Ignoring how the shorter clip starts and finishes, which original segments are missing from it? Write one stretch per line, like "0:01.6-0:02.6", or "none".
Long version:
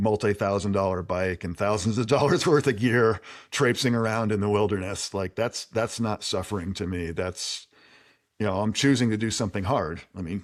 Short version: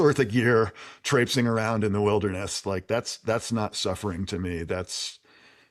none